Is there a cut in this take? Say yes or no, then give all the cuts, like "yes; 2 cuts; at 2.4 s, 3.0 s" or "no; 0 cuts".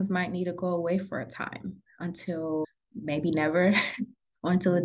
yes; 1 cut; at 2.8 s